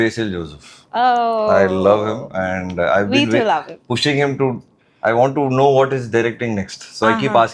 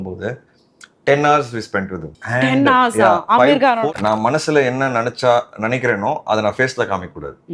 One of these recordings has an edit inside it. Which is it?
second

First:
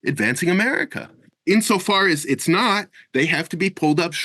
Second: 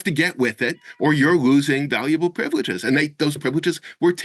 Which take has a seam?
first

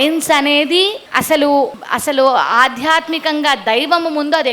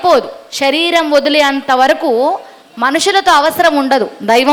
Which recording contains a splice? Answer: first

